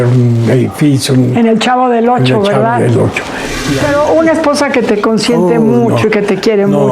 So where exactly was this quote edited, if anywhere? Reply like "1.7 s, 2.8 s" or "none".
3.7 s